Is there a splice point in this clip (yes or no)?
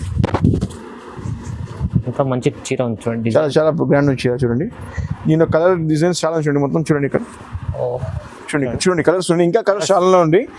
yes